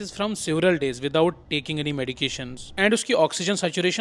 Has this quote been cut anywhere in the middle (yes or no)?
no